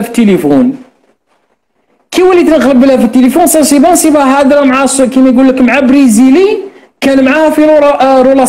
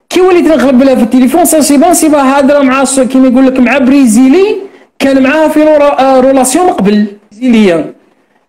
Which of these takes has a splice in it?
second; 1 cut; at 7.4 s

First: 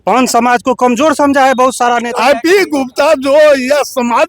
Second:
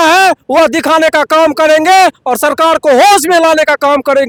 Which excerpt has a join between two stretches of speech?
first; 1 cut; at 2.1 s

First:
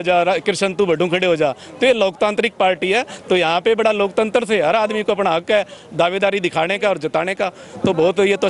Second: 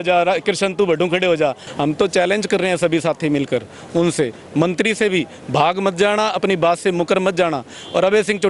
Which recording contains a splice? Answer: second; 1 cut; at 1.6 s

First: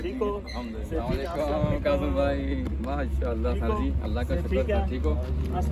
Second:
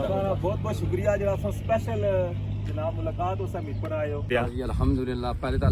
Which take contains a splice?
second; 1 cut; at 4.3 s

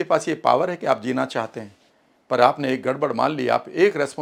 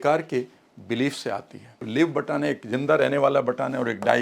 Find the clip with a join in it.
second; 1 cut; at 1.9 s

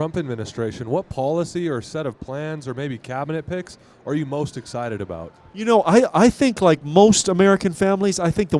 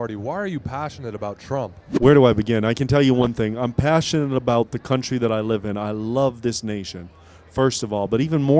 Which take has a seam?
second; 1 cut; at 1.8 s

